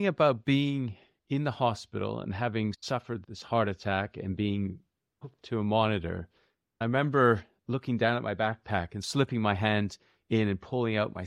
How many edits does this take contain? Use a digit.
5